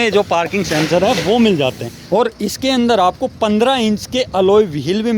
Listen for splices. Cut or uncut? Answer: cut